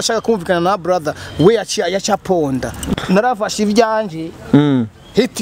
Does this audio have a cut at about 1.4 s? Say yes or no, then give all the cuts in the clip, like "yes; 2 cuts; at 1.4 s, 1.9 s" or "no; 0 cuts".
no; 1 cut; at 2.8 s